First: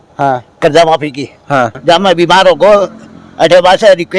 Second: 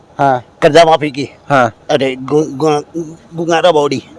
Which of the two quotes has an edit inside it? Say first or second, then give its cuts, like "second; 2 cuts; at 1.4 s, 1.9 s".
first; 1 cut; at 1.8 s